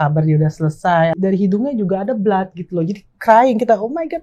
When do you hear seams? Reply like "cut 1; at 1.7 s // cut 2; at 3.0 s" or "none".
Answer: cut 1; at 1.2 s